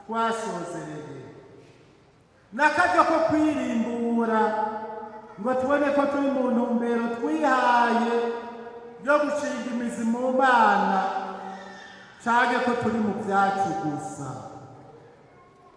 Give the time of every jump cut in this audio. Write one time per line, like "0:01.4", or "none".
none